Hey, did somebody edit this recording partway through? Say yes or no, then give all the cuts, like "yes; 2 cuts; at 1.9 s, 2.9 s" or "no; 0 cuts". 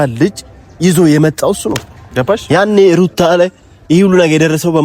yes; 1 cut; at 2.4 s